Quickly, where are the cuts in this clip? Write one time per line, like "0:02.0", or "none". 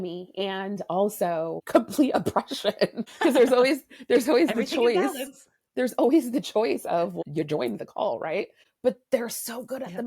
0:01.6
0:03.1
0:07.2
0:08.6